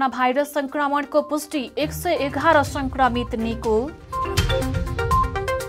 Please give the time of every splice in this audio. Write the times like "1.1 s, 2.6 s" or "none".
4.0 s